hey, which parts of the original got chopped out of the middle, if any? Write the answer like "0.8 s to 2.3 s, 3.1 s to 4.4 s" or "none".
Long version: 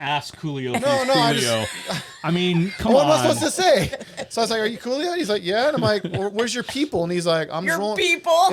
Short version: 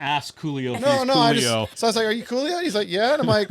1.7 s to 4.3 s